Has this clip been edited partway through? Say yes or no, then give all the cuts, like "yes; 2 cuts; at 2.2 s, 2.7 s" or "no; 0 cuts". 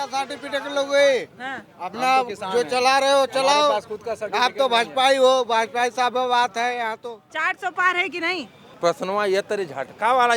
yes; 2 cuts; at 7.3 s, 8.6 s